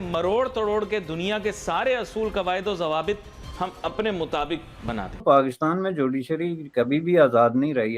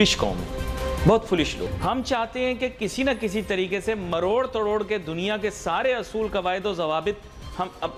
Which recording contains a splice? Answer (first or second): first